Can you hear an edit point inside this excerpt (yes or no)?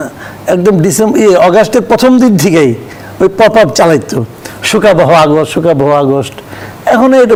no